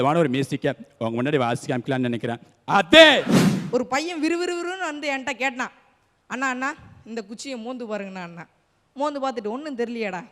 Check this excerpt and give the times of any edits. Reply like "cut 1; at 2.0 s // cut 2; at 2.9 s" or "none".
cut 1; at 3.4 s